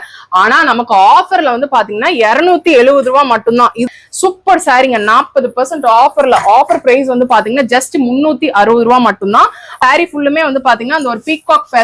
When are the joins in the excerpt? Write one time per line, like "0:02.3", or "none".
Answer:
0:03.9
0:09.6